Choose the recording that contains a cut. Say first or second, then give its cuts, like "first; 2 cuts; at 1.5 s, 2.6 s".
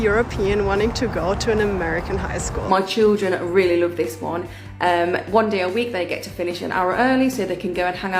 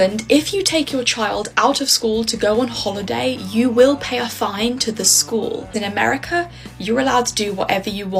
first; 1 cut; at 2.5 s